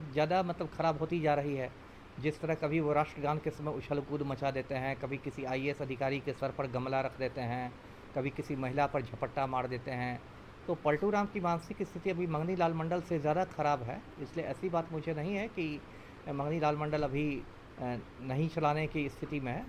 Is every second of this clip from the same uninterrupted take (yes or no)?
yes